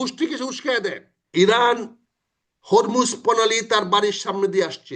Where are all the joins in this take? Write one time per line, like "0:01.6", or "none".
0:01.2

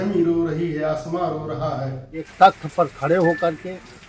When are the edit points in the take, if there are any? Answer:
0:02.3

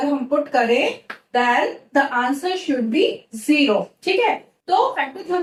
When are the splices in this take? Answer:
none

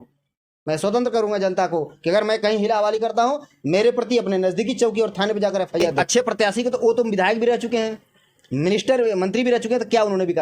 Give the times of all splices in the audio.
0:06.0

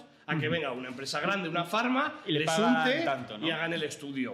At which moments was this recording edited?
none

